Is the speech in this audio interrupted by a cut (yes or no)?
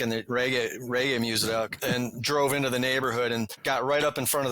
yes